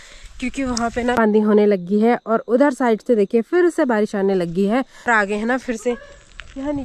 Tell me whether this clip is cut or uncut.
cut